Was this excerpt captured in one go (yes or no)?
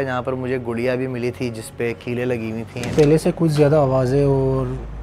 no